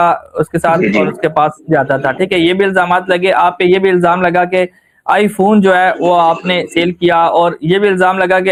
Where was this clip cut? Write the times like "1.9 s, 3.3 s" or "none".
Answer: none